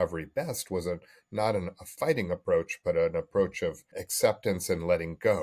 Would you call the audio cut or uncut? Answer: uncut